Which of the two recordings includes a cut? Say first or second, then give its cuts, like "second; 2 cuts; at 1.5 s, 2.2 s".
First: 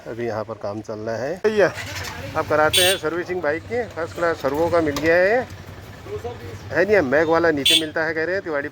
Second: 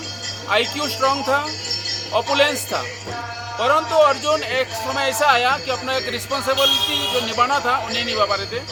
first; 1 cut; at 1.4 s